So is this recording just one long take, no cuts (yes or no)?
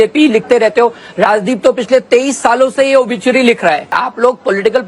no